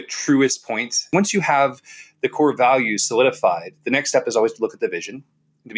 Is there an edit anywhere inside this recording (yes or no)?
yes